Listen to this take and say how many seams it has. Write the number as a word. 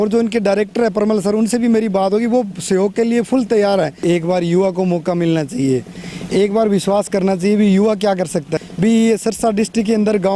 two